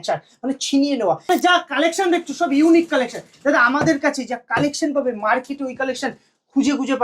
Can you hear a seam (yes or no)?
yes